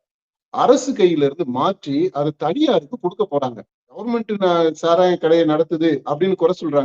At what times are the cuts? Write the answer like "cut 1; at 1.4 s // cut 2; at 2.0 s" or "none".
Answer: cut 1; at 4.1 s

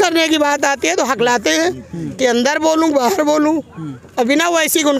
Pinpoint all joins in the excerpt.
none

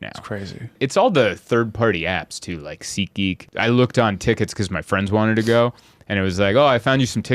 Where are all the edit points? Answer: cut 1; at 0.7 s // cut 2; at 3.4 s

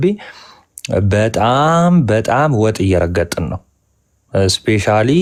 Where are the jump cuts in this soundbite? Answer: none

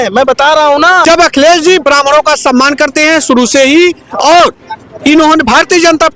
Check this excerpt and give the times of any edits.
cut 1; at 1.0 s

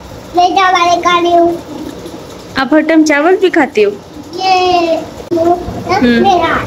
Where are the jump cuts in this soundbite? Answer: cut 1; at 5.2 s

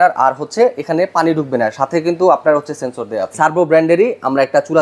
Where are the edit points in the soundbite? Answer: cut 1; at 3.3 s

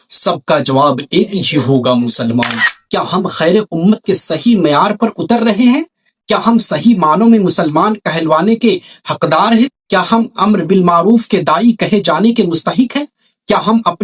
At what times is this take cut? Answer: cut 1; at 2.7 s

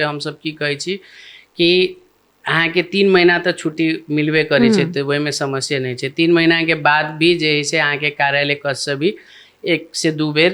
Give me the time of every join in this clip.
none

